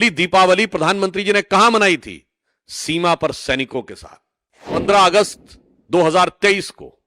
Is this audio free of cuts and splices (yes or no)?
no